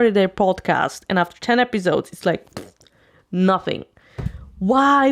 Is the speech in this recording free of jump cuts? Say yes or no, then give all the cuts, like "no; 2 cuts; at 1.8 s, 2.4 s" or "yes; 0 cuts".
yes; 0 cuts